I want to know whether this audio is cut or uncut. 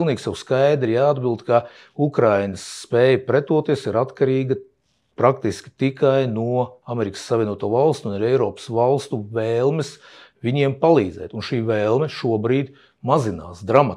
uncut